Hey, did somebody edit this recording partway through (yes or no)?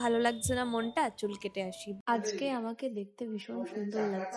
yes